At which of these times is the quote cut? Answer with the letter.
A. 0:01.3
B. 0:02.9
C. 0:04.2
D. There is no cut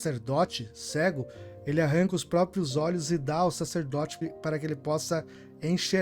C